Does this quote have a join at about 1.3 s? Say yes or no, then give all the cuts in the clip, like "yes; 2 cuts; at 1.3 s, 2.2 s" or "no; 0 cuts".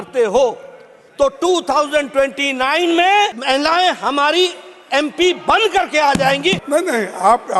no; 2 cuts; at 3.4 s, 6.6 s